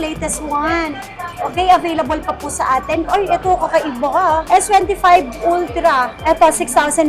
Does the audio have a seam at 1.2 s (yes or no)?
no